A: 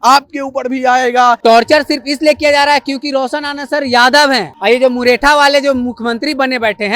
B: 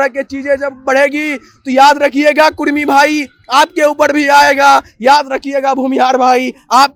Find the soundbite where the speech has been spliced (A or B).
A